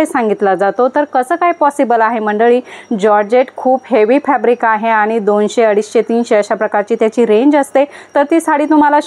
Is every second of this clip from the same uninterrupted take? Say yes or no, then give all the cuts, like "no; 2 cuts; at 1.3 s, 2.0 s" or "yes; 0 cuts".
yes; 0 cuts